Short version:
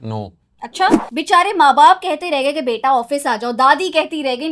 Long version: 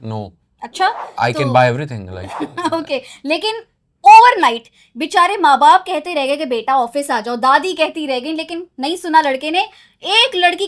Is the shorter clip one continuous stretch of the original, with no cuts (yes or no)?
no